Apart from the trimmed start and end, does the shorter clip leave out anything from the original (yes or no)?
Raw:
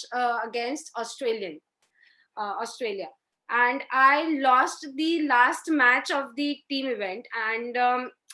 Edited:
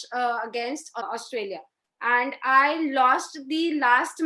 yes